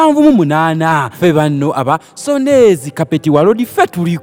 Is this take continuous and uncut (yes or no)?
yes